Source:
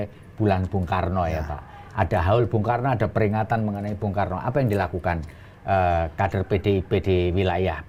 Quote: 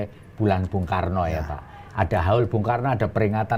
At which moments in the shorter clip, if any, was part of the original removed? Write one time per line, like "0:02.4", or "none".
none